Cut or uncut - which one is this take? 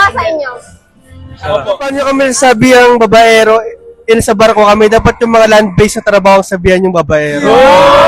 cut